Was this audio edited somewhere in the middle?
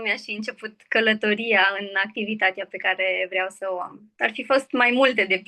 yes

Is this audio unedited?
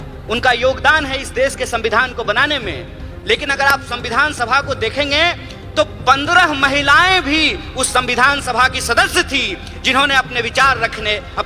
yes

